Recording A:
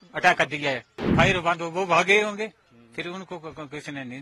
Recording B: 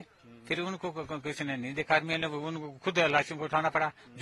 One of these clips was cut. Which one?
A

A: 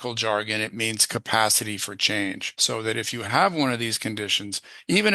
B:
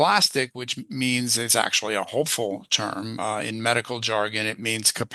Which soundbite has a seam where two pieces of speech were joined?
A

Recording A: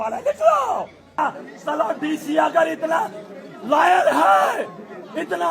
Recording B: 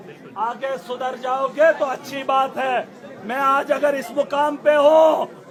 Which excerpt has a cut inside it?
A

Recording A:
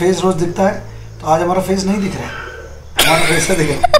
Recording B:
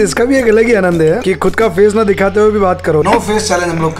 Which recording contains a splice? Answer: B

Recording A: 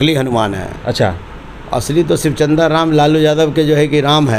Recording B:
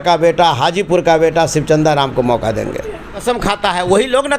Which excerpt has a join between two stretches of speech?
B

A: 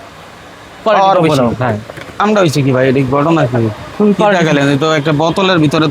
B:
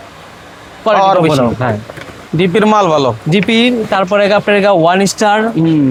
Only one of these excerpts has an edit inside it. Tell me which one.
A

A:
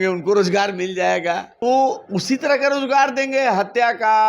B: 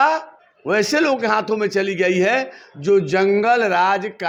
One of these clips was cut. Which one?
A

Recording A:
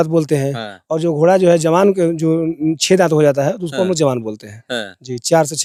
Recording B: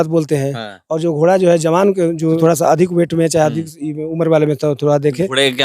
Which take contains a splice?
B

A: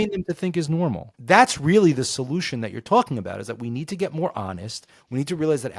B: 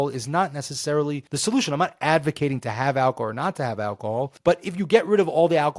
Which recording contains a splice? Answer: B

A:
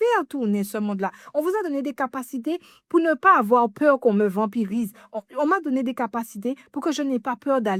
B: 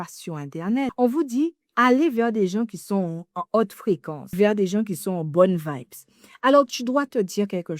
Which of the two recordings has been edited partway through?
B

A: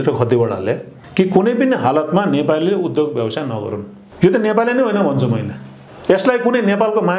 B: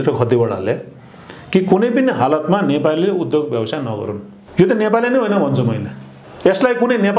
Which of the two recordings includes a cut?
A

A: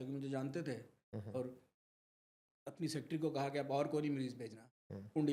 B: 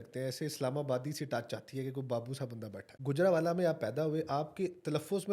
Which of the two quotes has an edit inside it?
B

